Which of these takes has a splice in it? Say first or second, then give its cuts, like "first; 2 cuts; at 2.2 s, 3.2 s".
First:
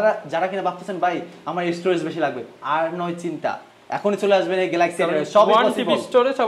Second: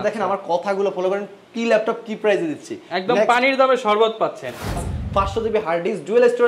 second; 1 cut; at 4.8 s